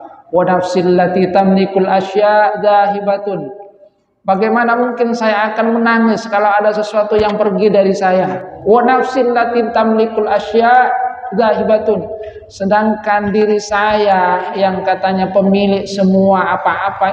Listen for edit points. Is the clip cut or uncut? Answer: cut